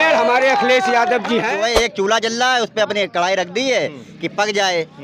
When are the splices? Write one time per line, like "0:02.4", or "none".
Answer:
0:01.6